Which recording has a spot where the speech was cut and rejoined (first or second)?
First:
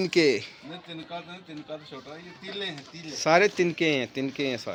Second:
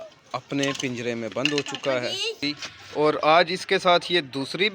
second